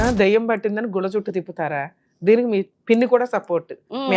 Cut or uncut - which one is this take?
cut